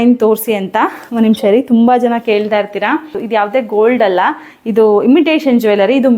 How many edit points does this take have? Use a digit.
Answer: 1